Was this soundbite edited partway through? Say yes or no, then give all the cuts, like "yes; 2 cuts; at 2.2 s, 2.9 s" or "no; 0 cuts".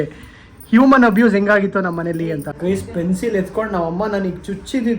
yes; 1 cut; at 2.5 s